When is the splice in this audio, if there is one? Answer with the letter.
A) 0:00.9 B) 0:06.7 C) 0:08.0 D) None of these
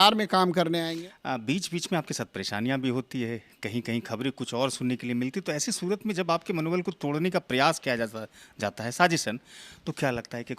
A